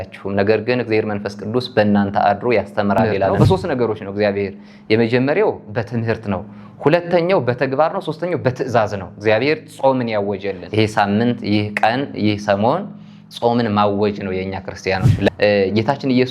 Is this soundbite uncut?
no; 3 cuts; at 3.3 s, 10.6 s, 15.3 s

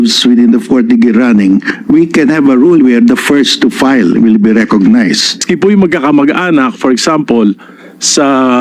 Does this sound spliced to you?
yes; 1 cut; at 5.5 s

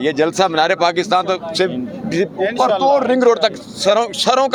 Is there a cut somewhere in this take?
no; 0 cuts

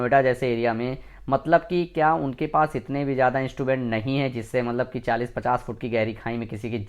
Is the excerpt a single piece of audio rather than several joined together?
yes; 0 cuts

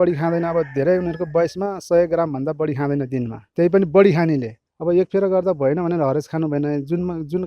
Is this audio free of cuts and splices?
no; 2 cuts; at 3.4 s, 4.5 s

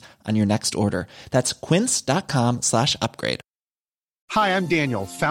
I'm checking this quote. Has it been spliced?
no; 0 cuts

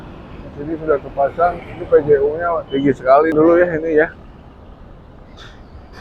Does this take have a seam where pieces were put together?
yes; 1 cut; at 3.3 s

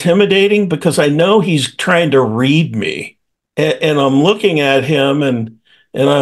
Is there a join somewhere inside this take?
no; 0 cuts

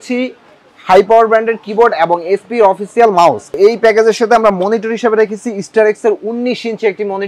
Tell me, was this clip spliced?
yes; 1 cut; at 3.6 s

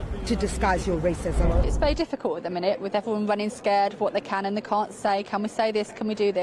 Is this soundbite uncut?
no; 1 cut; at 1.7 s

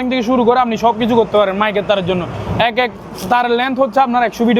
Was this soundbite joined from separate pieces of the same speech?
no; 0 cuts

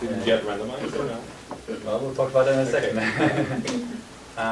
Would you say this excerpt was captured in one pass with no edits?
no; 1 cut; at 2.6 s

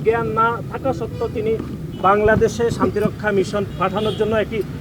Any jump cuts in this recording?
yes; 1 cut; at 3.7 s

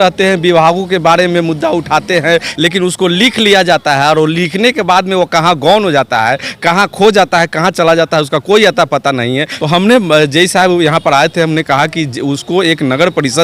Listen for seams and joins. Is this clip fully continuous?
no; 2 cuts; at 2.5 s, 9.5 s

